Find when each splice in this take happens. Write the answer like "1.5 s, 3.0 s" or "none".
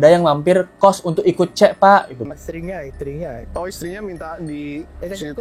2.2 s